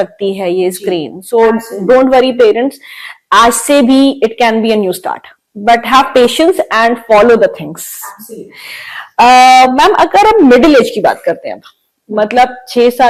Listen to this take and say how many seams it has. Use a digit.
0